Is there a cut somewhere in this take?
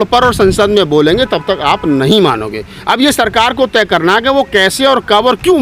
no; 0 cuts

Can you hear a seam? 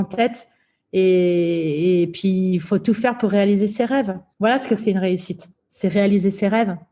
yes; 1 cut; at 4.3 s

